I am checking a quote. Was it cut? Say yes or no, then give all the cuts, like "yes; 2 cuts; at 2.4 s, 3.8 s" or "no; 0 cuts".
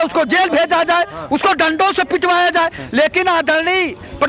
no; 0 cuts